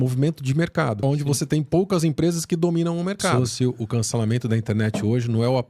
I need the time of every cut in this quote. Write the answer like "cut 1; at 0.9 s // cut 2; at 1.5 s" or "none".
cut 1; at 1.0 s // cut 2; at 3.3 s